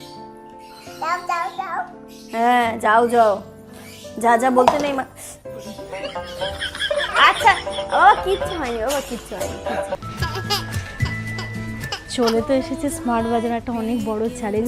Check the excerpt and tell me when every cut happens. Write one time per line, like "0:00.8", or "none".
0:10.0